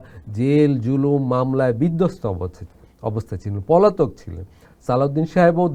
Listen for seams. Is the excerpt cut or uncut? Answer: uncut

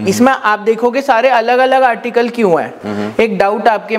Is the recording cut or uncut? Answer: uncut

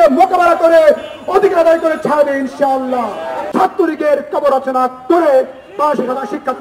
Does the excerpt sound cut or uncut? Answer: cut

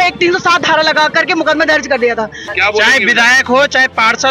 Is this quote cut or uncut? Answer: cut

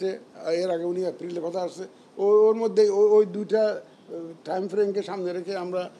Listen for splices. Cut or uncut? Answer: uncut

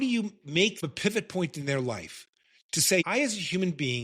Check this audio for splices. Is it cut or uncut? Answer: cut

